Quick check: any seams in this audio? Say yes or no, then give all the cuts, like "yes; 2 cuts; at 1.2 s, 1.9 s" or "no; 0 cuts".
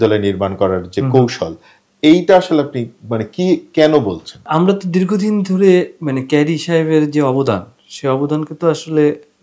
yes; 1 cut; at 4.4 s